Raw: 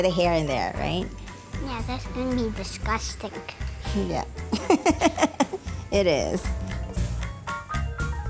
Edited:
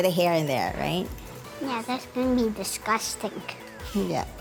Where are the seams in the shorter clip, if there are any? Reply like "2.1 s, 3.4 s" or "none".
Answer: none